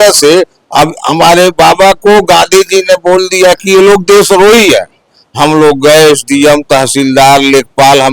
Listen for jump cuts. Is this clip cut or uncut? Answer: cut